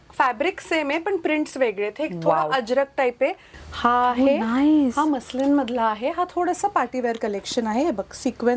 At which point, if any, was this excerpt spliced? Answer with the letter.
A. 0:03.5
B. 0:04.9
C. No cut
A